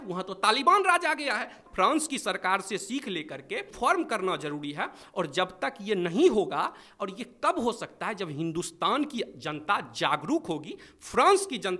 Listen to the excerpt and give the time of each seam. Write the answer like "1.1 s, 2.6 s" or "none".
1.5 s